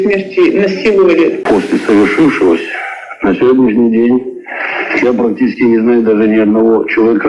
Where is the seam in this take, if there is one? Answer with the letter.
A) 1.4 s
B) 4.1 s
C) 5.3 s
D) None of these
A